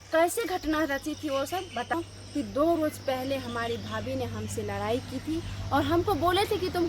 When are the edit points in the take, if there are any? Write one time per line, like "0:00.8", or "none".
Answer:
0:01.9